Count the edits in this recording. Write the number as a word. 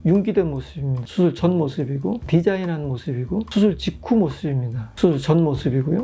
two